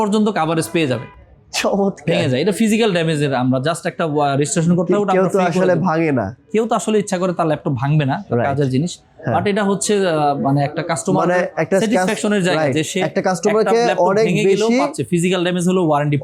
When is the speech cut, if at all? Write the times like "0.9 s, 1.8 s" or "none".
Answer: none